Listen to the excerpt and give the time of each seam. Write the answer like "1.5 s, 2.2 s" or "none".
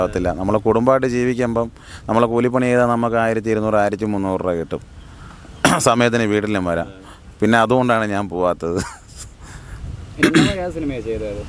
none

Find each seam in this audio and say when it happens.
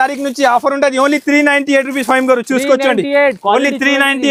none

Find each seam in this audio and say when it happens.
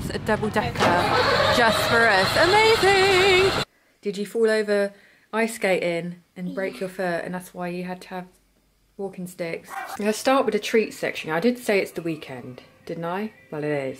3.7 s, 9.9 s

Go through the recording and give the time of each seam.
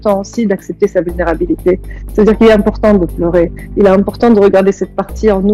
none

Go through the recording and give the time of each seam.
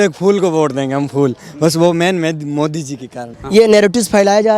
3.3 s

